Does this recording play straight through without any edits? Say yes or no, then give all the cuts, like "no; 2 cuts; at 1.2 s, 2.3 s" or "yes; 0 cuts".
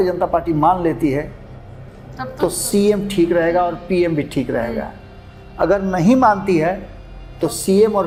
yes; 0 cuts